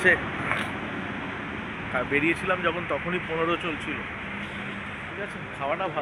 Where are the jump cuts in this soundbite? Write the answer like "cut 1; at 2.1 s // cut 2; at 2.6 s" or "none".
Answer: none